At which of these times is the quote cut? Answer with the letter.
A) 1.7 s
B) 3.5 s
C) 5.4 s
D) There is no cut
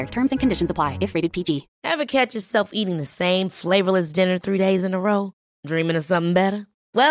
A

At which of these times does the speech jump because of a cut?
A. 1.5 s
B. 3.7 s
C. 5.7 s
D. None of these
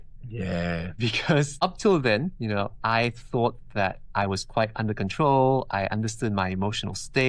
A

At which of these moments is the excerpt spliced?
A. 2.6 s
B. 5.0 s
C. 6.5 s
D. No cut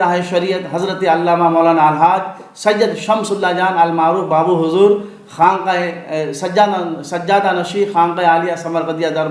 D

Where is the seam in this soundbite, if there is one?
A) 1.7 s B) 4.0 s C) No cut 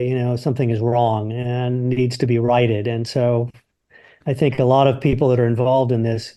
C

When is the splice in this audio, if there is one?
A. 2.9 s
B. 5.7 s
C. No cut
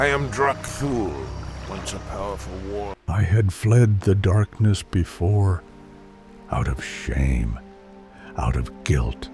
A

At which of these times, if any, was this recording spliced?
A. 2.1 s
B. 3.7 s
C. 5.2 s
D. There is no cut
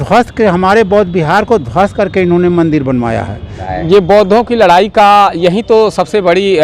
B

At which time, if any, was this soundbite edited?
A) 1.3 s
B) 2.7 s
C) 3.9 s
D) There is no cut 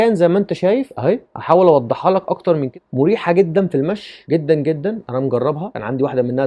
B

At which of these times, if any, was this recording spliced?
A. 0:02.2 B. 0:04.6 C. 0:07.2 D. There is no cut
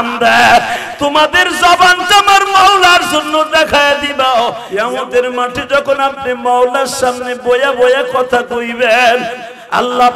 B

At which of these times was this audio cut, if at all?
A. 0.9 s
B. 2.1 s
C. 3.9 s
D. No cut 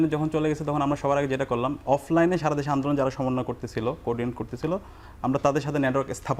D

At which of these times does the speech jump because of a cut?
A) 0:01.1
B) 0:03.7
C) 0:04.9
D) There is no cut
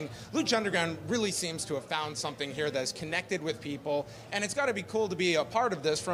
D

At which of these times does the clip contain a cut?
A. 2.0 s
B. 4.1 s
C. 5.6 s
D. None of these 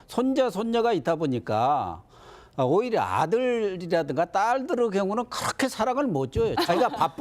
B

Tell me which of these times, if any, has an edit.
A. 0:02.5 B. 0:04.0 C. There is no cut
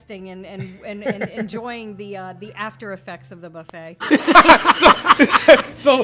B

